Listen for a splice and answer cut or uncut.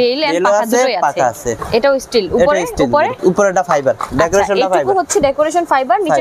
cut